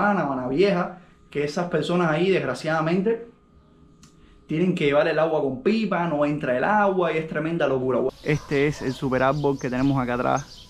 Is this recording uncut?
no; 1 cut; at 8.1 s

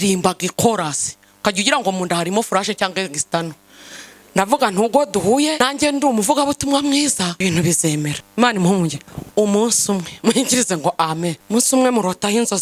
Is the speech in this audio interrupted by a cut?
yes; 4 cuts; at 5.6 s, 7.3 s, 8.2 s, 11.4 s

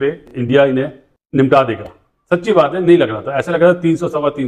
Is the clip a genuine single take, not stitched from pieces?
yes; 0 cuts

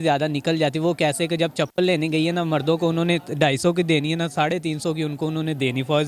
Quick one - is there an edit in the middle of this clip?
no; 0 cuts

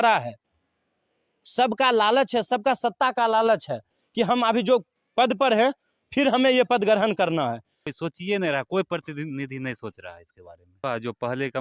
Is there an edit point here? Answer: yes; 2 cuts; at 7.8 s, 10.8 s

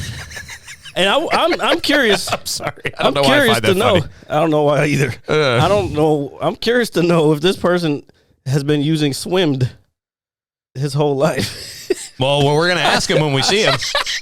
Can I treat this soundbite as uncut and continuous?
yes; 0 cuts

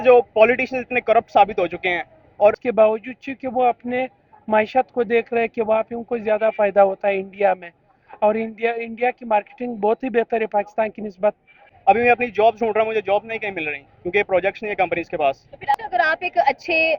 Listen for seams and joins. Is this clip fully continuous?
no; 3 cuts; at 2.6 s, 11.6 s, 15.7 s

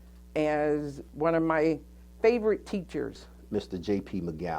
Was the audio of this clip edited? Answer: yes; 2 cuts; at 1.0 s, 3.3 s

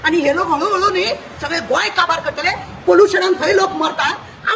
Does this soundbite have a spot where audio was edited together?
no; 0 cuts

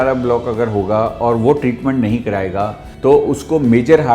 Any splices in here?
yes; 1 cut; at 2.8 s

